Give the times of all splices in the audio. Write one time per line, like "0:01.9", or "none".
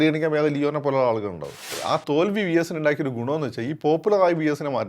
0:01.7